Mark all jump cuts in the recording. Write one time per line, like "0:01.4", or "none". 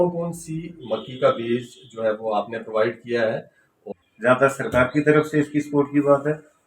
0:03.9